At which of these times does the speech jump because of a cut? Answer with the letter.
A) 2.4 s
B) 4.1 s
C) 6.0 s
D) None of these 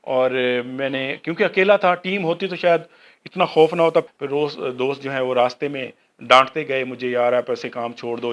B